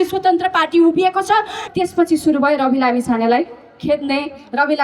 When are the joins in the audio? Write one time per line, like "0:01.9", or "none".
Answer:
0:01.6